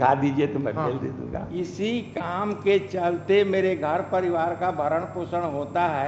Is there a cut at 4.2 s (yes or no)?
no